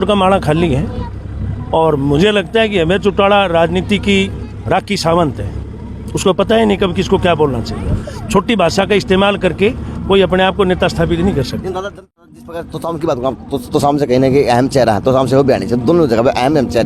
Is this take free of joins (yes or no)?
no